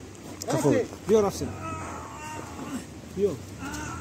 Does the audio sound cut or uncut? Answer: uncut